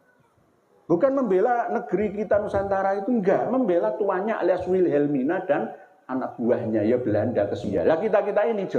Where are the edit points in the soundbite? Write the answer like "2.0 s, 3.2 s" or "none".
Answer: 7.7 s